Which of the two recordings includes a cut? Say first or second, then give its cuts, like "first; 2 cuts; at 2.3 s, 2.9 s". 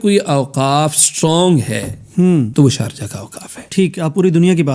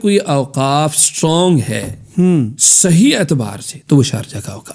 first; 1 cut; at 2.5 s